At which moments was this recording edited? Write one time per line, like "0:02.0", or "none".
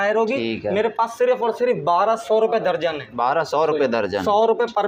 none

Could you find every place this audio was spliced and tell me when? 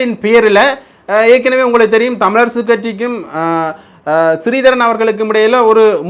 none

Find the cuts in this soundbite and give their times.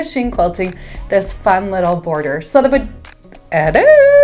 none

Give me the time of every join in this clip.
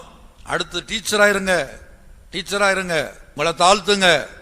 0:03.2

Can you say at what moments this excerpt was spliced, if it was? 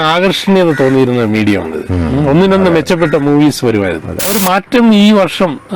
0:04.4

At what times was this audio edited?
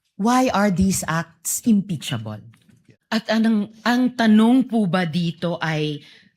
0:02.9

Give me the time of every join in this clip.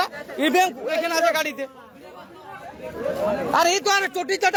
none

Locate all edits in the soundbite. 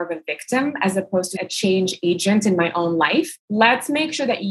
0:01.4
0:03.4

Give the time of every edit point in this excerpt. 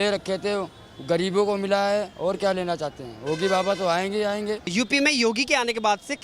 0:04.7

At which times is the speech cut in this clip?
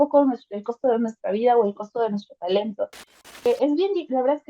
0:03.5

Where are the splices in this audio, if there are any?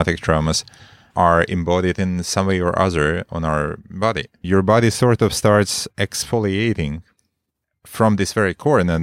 0:04.4

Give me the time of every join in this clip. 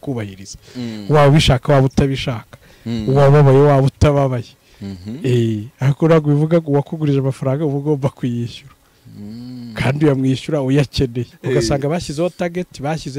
0:11.3

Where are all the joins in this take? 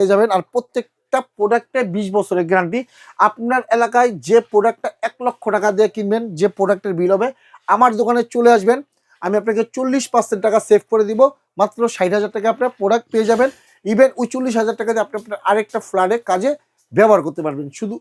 none

